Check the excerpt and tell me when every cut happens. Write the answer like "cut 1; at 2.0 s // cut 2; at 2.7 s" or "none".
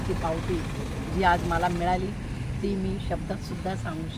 none